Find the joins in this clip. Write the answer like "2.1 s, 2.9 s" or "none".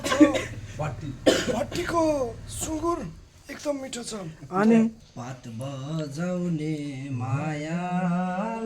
5.1 s